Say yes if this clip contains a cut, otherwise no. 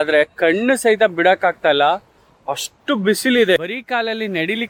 no